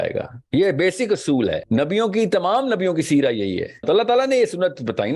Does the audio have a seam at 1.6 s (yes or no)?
yes